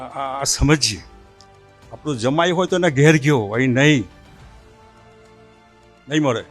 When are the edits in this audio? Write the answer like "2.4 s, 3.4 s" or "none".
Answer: none